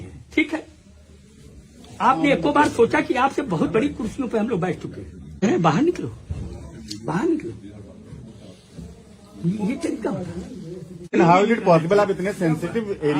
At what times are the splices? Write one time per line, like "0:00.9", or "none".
0:05.4
0:11.1